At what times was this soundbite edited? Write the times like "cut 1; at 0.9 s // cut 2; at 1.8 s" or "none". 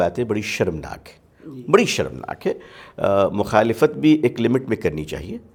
none